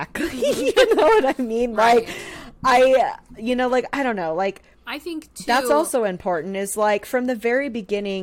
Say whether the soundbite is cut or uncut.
uncut